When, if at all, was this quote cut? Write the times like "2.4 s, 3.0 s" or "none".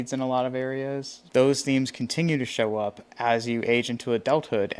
1.2 s